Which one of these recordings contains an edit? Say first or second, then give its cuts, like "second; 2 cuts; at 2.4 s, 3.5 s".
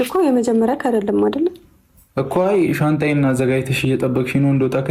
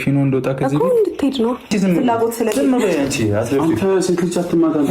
second; 1 cut; at 1.7 s